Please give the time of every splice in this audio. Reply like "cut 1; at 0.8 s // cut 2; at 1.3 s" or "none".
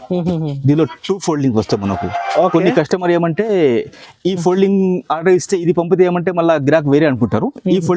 none